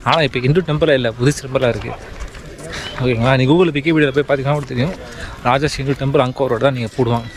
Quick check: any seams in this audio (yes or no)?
no